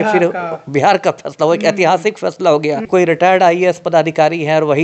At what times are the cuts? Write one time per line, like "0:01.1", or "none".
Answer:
0:02.8